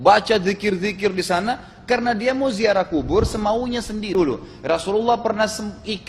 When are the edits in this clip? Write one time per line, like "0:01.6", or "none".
0:04.1